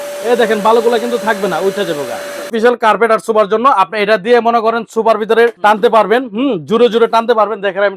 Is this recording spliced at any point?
yes; 2 cuts; at 2.5 s, 5.6 s

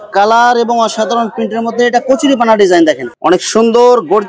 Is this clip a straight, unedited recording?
no; 1 cut; at 3.1 s

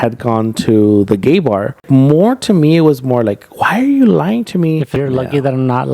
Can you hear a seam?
yes; 2 cuts; at 1.8 s, 4.9 s

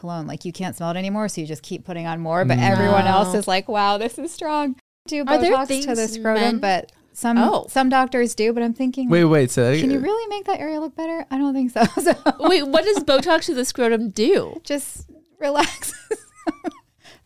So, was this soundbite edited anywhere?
yes; 1 cut; at 5.1 s

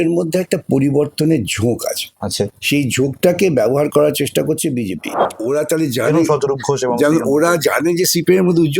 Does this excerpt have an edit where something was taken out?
yes; 1 cut; at 5.3 s

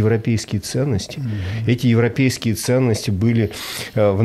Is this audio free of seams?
yes; 0 cuts

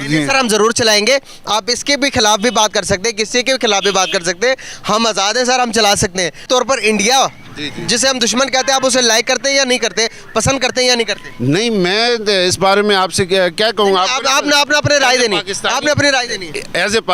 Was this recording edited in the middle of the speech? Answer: yes; 1 cut; at 6.4 s

